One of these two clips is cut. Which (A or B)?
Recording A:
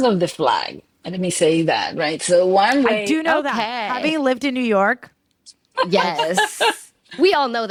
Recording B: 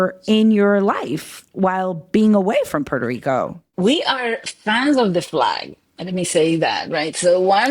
B